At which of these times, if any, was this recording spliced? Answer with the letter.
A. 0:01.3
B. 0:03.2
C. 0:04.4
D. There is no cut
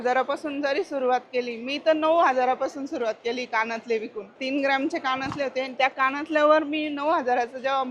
C